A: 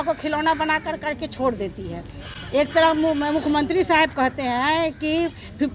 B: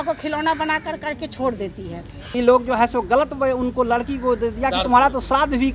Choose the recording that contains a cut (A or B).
B